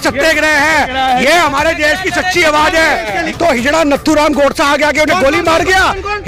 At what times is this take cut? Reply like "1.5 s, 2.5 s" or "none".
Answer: 3.3 s